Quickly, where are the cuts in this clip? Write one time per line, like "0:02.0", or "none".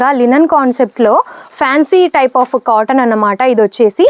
none